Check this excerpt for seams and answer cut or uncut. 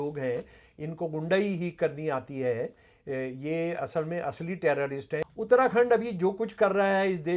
cut